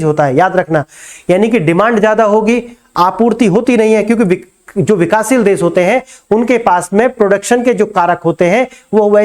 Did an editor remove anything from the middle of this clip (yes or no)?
no